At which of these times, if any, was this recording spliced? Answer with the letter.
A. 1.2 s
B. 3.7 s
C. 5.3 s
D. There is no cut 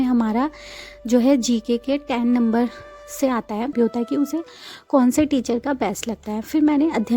B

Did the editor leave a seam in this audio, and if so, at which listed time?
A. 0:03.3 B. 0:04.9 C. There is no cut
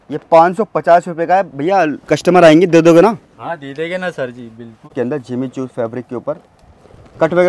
B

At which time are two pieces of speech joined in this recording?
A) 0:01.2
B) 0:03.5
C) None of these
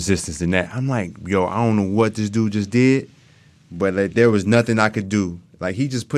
C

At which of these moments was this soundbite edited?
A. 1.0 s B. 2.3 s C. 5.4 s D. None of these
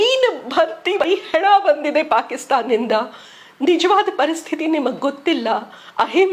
A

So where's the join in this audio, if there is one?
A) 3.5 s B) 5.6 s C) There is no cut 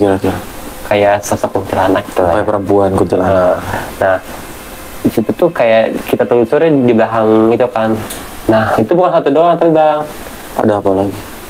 C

